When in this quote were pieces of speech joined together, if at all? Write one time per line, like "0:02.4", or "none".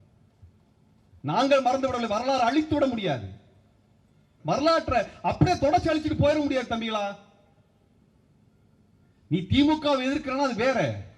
0:04.3